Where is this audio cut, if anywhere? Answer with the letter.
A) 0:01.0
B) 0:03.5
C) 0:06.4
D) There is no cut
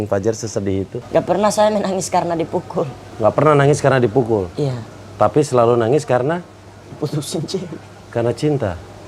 A